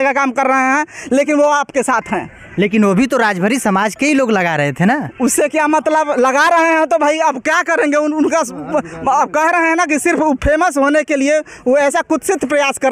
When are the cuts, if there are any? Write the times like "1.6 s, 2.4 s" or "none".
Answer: none